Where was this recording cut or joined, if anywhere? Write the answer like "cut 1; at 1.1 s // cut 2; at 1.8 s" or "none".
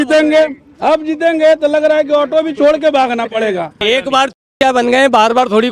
cut 1; at 3.8 s